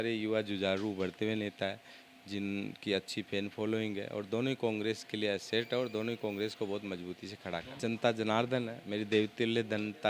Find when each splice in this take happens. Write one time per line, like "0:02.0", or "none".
0:07.7
0:08.8